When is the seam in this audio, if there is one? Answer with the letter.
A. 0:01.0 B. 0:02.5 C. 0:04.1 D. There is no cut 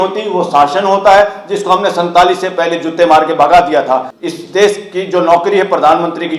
C